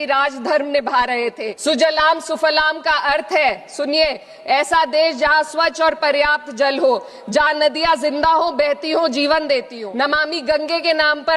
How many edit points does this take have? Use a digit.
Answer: 2